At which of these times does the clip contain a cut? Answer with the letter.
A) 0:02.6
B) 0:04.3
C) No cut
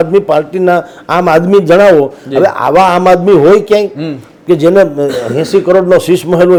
C